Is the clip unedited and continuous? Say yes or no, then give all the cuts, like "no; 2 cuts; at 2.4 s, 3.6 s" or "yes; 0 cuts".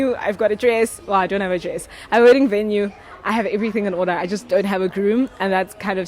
yes; 0 cuts